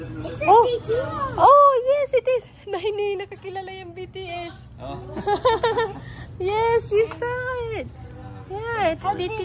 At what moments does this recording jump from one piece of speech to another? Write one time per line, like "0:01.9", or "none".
none